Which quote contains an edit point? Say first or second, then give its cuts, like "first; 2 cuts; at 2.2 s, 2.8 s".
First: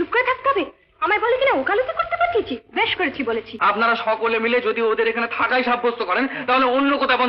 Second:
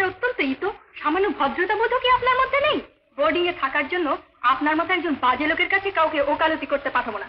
first; 1 cut; at 3.5 s